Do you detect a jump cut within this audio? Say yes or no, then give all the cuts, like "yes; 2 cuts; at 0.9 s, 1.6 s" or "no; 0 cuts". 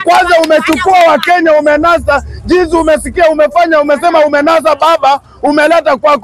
no; 0 cuts